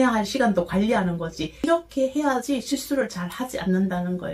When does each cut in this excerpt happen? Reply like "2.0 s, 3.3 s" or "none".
1.6 s